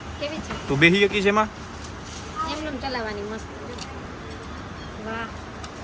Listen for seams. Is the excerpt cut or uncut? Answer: uncut